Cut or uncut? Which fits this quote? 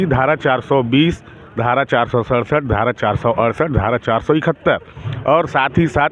uncut